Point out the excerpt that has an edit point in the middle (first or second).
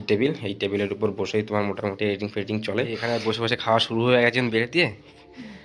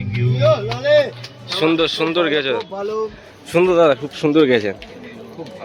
first